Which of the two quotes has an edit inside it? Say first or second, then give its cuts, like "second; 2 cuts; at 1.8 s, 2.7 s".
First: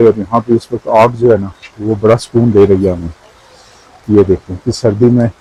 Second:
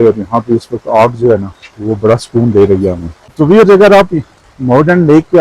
second; 1 cut; at 3.3 s